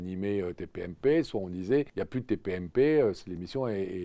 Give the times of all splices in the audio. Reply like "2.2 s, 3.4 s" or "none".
2.0 s